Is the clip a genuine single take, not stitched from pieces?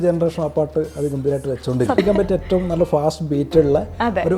no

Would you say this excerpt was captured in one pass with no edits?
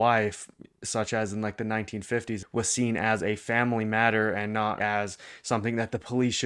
no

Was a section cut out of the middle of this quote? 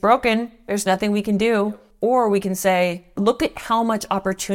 yes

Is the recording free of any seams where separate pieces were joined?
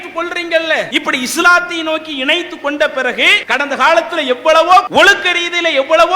no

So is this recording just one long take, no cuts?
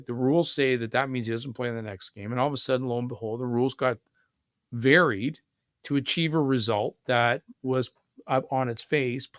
yes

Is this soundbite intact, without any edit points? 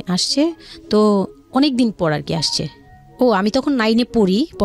yes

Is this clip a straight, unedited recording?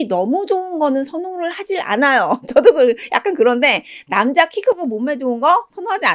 yes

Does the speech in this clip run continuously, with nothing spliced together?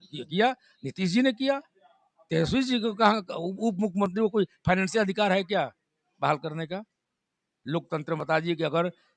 yes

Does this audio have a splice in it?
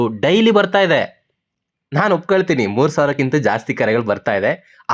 no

